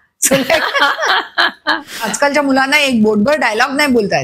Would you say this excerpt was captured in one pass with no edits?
no; 1 cut; at 2.1 s

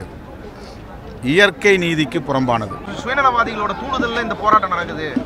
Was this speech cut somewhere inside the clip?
yes; 1 cut; at 2.8 s

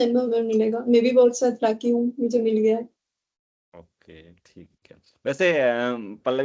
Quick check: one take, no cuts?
yes; 0 cuts

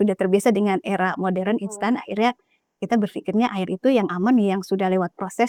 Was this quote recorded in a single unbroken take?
yes; 0 cuts

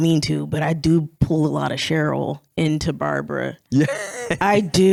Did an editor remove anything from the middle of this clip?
no; 0 cuts

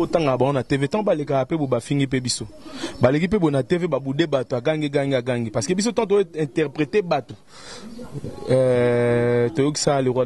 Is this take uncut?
yes; 0 cuts

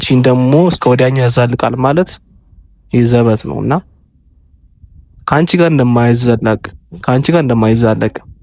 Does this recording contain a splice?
no; 0 cuts

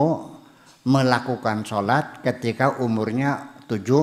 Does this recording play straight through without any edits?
yes; 0 cuts

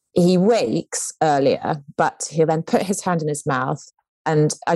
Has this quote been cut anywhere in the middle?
yes; 1 cut; at 1.8 s

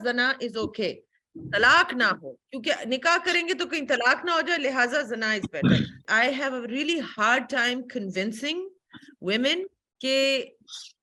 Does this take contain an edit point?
yes; 2 cuts; at 6.0 s, 9.8 s

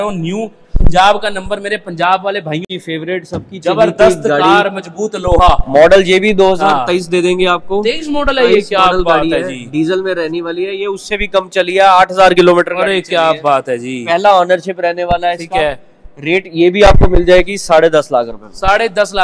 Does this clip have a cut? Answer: yes; 1 cut; at 2.6 s

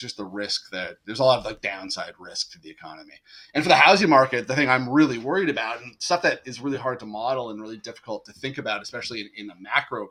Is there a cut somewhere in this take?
no; 0 cuts

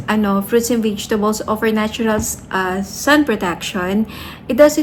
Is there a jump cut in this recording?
no; 0 cuts

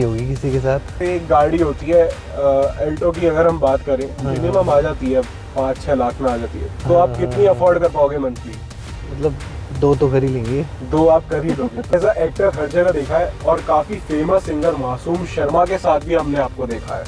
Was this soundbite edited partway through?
yes; 2 cuts; at 0.9 s, 11.9 s

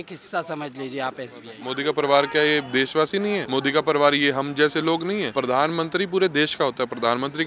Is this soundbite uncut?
no; 3 cuts; at 1.6 s, 3.4 s, 5.3 s

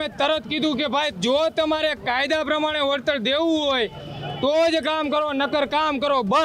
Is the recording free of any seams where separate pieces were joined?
yes; 0 cuts

